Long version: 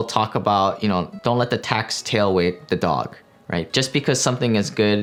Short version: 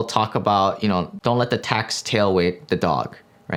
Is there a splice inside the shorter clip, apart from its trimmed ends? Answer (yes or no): no